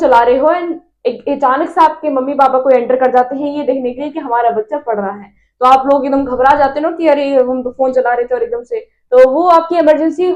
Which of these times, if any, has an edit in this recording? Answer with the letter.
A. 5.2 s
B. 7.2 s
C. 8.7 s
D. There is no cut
D